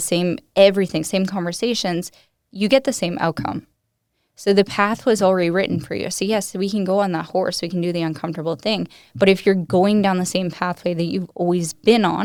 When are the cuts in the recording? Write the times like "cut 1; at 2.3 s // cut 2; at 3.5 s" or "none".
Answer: none